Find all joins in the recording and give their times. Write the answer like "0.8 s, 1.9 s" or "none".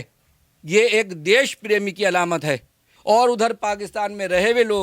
2.9 s